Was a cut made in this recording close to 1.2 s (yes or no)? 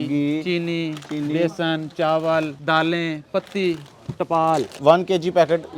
no